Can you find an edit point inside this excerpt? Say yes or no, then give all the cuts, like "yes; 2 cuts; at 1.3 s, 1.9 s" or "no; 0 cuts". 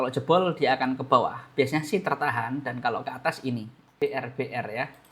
yes; 1 cut; at 3.9 s